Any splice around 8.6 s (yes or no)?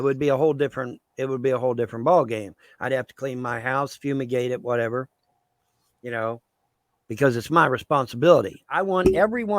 yes